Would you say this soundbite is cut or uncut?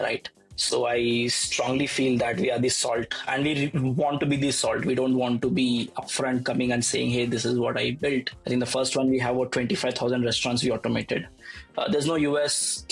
cut